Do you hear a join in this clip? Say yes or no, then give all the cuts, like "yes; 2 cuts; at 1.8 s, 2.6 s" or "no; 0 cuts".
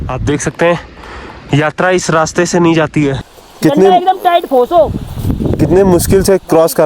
yes; 1 cut; at 3.2 s